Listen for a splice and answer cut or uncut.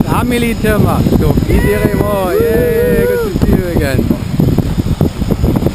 uncut